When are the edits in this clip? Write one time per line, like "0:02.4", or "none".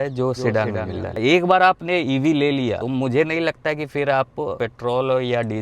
0:01.0
0:02.8
0:04.5